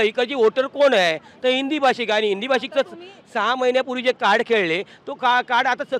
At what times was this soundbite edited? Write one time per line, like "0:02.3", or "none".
none